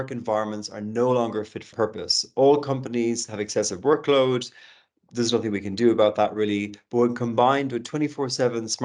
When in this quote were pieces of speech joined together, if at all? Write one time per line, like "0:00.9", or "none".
0:01.7